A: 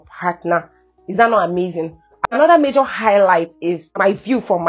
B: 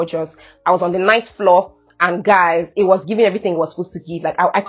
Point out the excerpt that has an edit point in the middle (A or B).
A